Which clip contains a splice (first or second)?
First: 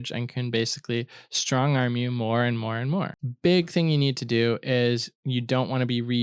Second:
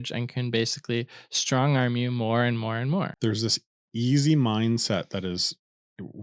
first